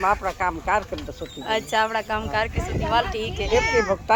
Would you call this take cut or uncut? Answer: uncut